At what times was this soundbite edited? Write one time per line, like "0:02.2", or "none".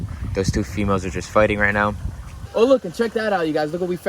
0:02.4

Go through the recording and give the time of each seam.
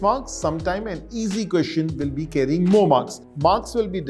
0:03.2

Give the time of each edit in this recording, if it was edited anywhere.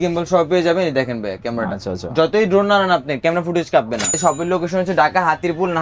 0:04.1

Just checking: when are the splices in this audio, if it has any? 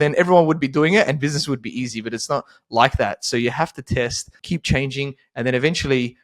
0:04.4

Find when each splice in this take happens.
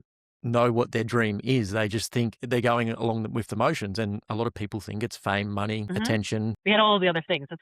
0:05.8
0:06.6

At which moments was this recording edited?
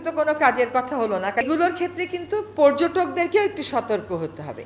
0:01.4

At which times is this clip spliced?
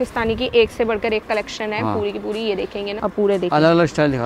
0:03.0

